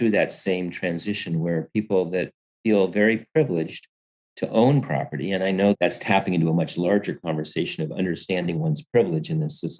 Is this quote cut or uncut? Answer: cut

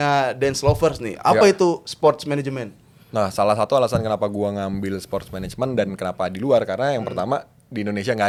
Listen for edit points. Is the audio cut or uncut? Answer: uncut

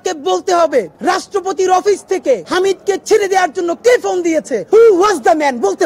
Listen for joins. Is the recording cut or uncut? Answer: cut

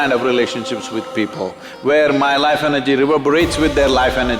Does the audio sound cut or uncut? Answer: uncut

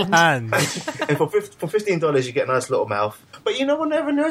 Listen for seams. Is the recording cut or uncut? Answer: cut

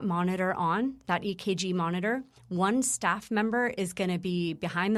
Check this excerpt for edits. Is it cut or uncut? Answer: uncut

